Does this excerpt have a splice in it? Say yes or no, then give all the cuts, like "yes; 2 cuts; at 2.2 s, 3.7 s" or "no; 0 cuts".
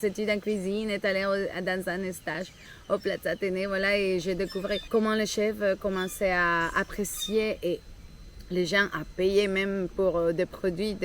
no; 0 cuts